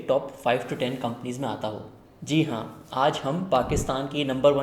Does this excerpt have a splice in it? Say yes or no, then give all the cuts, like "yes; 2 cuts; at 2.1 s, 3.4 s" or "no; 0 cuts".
no; 0 cuts